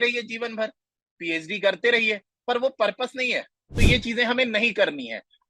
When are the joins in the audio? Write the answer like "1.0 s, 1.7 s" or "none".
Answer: 3.6 s

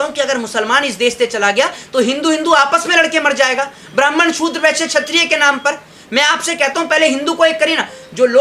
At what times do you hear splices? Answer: none

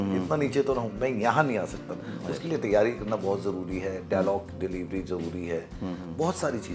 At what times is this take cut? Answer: none

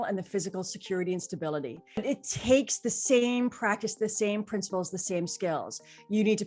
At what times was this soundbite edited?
2.0 s

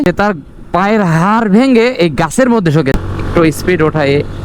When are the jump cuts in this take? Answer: 2.9 s

